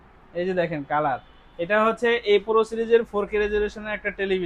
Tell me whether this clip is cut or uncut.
uncut